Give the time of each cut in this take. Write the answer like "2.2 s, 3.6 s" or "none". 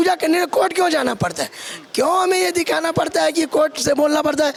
none

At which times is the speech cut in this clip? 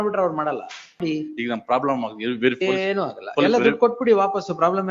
1.0 s

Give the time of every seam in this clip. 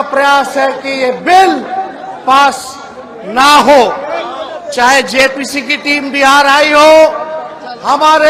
none

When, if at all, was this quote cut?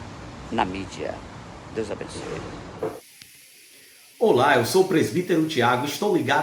none

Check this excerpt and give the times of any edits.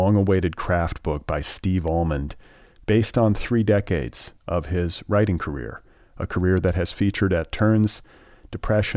none

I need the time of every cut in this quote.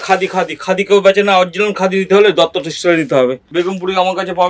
3.4 s

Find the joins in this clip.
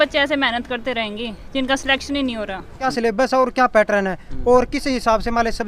2.8 s

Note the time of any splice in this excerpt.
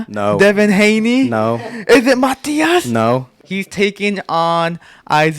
3.4 s

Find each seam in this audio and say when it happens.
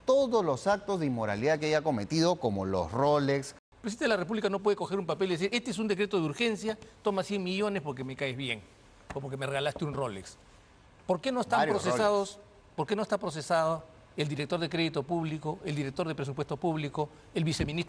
3.6 s

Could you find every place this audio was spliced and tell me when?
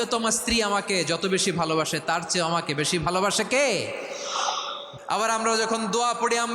4.8 s

